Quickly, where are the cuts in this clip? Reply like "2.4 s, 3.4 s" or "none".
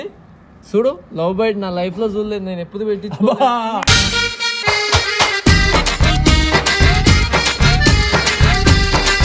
none